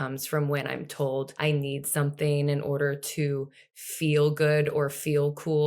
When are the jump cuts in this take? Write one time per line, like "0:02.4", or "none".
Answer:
0:01.3